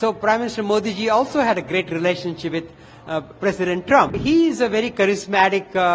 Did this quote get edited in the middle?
yes; 1 cut; at 4.1 s

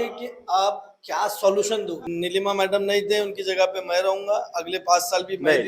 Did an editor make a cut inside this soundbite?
yes; 1 cut; at 2.0 s

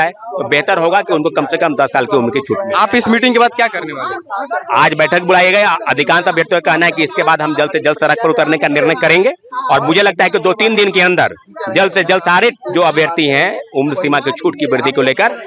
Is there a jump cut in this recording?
no; 0 cuts

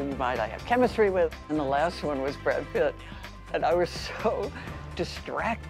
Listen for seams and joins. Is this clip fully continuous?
no; 1 cut; at 1.4 s

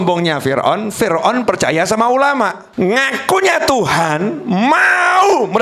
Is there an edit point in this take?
yes; 1 cut; at 2.6 s

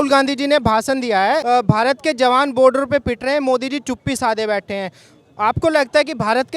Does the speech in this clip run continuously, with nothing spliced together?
no; 1 cut; at 1.4 s

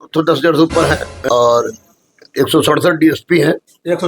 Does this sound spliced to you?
yes; 1 cut; at 1.2 s

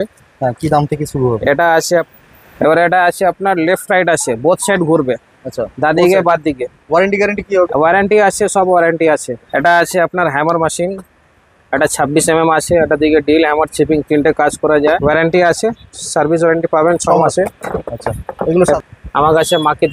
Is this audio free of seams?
no; 4 cuts; at 1.9 s, 9.4 s, 14.9 s, 18.6 s

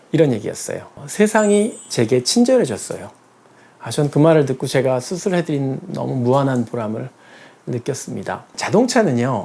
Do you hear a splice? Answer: yes; 1 cut; at 8.4 s

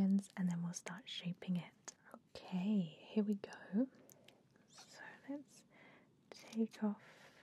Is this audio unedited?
no; 1 cut; at 1.8 s

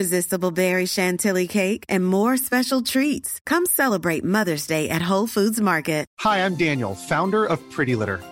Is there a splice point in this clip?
yes; 1 cut; at 6.1 s

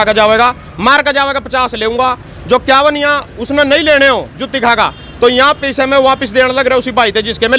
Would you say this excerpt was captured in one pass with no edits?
yes; 0 cuts

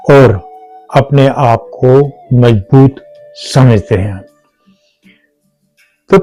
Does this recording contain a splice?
no; 0 cuts

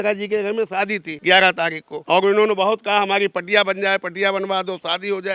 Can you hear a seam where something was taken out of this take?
yes; 2 cuts; at 1.1 s, 1.9 s

